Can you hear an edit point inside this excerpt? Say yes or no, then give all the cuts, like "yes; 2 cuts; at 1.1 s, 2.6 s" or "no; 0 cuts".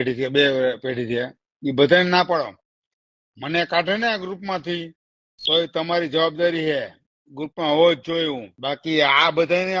no; 0 cuts